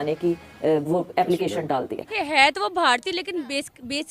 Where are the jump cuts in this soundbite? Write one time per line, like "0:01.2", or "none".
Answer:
0:02.1